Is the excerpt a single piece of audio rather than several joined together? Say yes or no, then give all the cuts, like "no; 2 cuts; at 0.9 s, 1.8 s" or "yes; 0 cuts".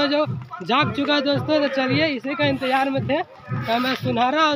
yes; 0 cuts